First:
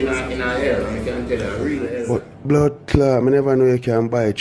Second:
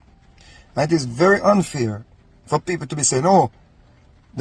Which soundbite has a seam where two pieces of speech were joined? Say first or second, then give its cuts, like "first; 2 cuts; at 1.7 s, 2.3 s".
first; 1 cut; at 2.0 s